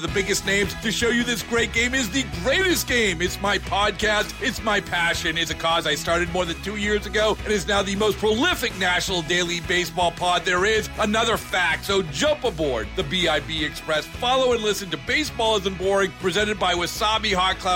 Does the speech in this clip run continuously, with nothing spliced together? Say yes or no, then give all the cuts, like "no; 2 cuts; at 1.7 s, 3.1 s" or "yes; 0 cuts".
yes; 0 cuts